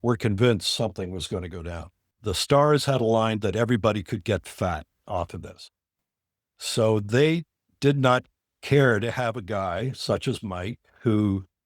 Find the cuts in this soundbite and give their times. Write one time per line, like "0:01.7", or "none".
0:02.0